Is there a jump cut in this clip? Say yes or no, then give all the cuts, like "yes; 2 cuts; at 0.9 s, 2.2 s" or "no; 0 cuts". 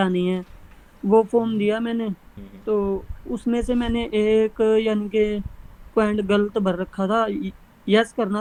no; 0 cuts